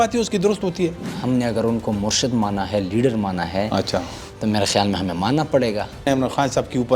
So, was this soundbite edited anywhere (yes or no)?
yes